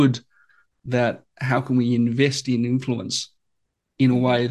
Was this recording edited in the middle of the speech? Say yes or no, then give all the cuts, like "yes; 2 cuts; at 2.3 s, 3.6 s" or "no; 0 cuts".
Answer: no; 0 cuts